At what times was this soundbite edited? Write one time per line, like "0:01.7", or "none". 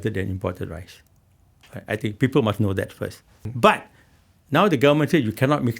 0:03.3

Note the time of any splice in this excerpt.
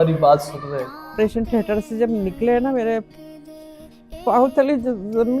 0:01.1

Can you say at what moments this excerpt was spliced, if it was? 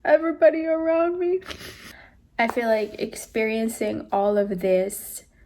0:02.2

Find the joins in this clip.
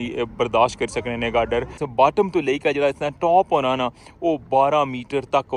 0:01.8

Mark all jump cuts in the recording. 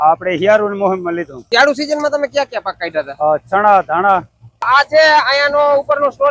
0:01.3
0:04.7

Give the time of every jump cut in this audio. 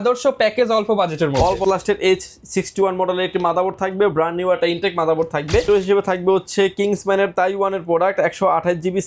0:01.6
0:05.6

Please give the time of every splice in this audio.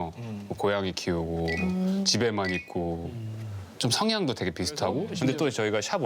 0:05.1

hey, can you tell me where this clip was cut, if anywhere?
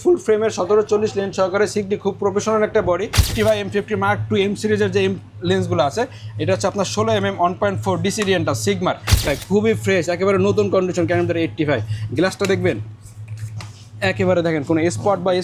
0:03.2
0:09.3

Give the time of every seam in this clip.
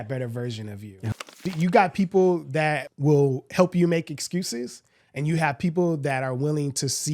0:01.2
0:02.9

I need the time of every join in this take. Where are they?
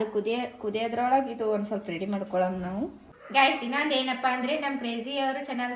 0:03.2

